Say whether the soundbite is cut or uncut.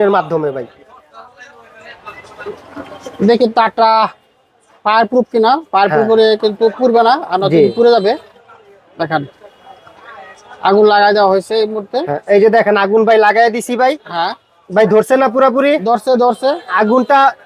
uncut